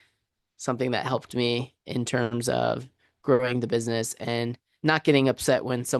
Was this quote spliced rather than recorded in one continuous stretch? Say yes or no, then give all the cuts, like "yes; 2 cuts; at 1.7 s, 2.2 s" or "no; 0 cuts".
no; 0 cuts